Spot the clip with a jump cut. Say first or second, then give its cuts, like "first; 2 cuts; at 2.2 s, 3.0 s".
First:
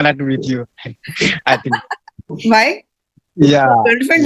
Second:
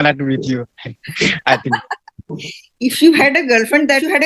first; 1 cut; at 2.3 s